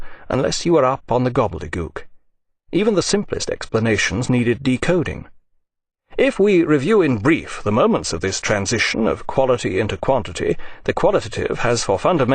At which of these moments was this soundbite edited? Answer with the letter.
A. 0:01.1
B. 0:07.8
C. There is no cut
A